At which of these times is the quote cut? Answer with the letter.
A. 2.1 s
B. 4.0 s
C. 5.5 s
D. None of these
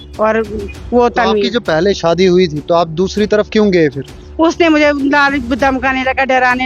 D